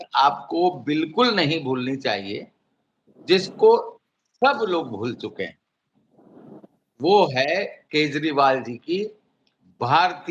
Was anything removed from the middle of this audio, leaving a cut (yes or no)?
no